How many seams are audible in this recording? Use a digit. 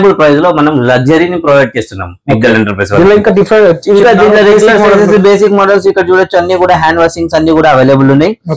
0